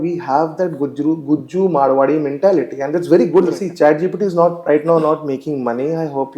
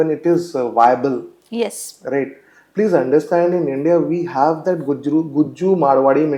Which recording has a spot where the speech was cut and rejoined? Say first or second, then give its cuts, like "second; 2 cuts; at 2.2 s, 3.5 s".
first; 1 cut; at 3.6 s